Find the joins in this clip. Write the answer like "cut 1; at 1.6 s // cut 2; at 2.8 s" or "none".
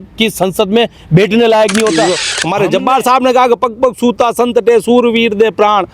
cut 1; at 2.3 s